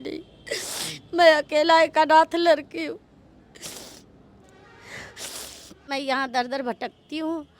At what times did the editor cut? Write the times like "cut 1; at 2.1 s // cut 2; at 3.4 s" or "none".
cut 1; at 5.9 s